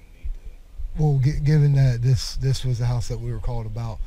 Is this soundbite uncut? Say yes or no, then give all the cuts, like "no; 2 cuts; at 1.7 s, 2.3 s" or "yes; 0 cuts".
yes; 0 cuts